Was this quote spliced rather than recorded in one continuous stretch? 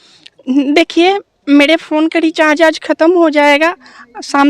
no; 0 cuts

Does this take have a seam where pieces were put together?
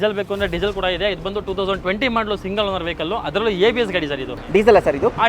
yes; 1 cut; at 4.3 s

